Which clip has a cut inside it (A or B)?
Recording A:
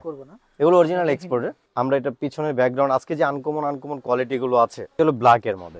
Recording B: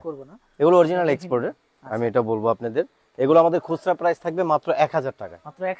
A